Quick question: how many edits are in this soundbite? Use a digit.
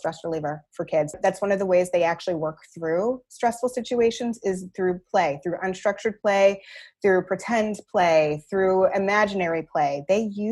1